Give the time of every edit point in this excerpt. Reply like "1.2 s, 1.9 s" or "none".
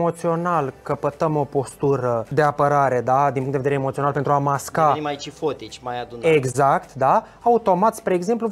2.3 s